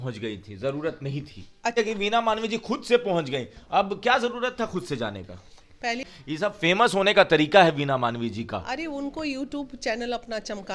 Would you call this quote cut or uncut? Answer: cut